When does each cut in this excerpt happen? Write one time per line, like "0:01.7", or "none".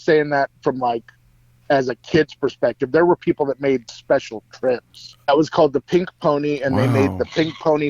0:05.3